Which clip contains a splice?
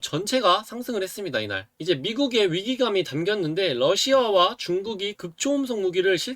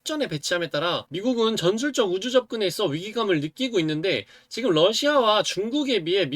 first; 1 cut; at 1.7 s

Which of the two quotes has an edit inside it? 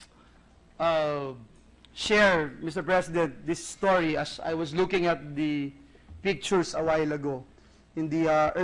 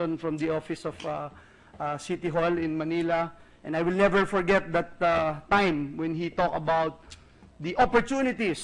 first; 1 cut; at 7.5 s

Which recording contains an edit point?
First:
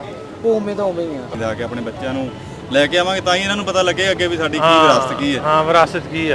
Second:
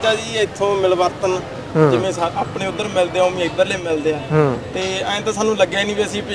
first; 1 cut; at 1.3 s

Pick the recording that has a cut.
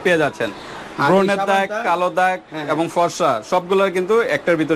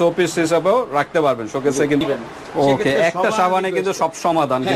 second; 1 cut; at 2.0 s

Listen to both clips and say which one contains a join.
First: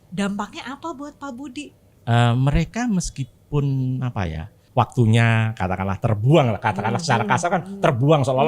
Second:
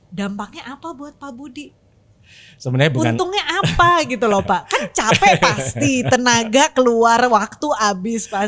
first; 2 cuts; at 1.8 s, 4.6 s

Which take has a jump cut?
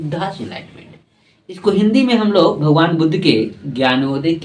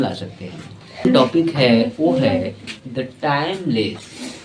second; 1 cut; at 1.0 s

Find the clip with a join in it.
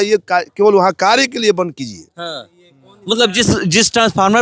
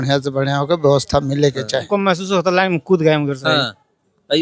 second; 1 cut; at 1.9 s

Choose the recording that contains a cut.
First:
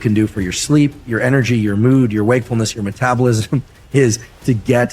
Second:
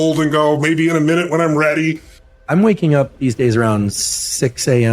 second; 1 cut; at 2.5 s

